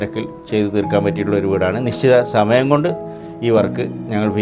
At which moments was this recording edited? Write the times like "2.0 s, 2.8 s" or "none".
none